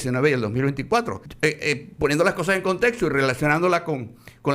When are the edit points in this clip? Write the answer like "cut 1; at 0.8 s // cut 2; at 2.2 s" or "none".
cut 1; at 1.2 s